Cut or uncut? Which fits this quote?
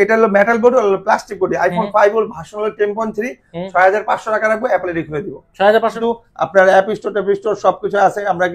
cut